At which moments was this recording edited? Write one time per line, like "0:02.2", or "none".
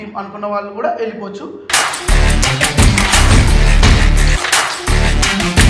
none